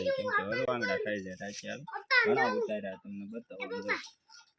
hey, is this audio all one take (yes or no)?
yes